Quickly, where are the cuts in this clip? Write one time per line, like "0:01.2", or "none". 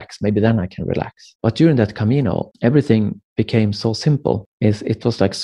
0:01.2
0:02.5
0:04.5